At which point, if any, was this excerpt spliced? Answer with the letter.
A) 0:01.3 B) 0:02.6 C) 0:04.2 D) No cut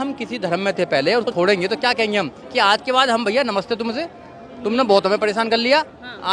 A